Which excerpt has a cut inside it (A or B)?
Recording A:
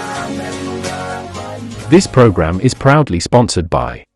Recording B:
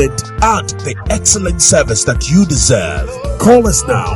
A